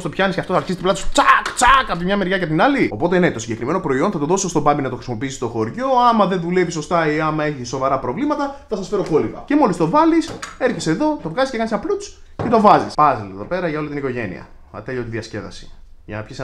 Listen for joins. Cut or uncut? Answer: cut